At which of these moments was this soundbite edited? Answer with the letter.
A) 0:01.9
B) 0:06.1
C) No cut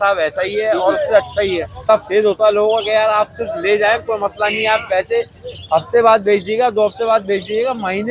A